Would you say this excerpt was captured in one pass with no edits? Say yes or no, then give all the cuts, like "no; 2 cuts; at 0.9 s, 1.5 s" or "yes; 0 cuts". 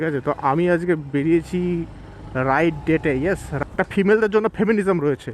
no; 1 cut; at 3.6 s